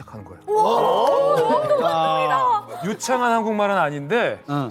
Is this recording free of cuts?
no; 1 cut; at 1.0 s

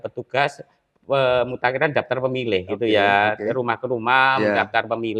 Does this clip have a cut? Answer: no; 0 cuts

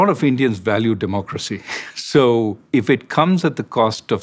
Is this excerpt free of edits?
no; 1 cut; at 2.6 s

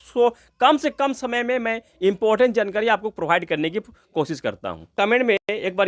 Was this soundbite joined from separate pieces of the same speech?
yes; 1 cut; at 4.8 s

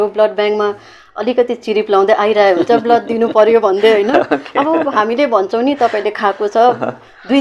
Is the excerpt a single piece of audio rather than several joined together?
yes; 0 cuts

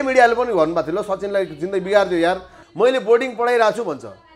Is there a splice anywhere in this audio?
yes; 1 cut; at 2.5 s

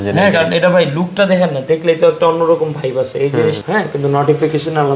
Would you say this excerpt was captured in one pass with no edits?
no; 1 cut; at 3.6 s

